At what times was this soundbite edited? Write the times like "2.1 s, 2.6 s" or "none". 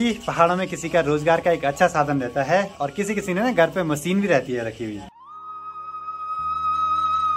none